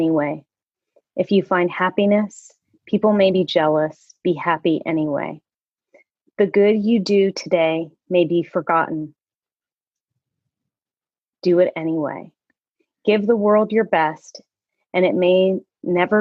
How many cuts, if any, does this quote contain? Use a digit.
0